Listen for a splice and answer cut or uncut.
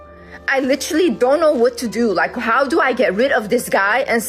uncut